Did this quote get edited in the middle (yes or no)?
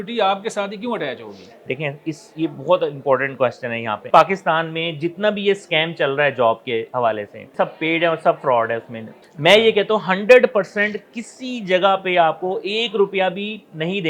yes